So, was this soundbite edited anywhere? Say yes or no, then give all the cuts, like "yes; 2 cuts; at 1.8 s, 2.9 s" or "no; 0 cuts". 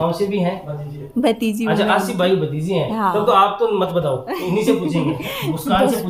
no; 0 cuts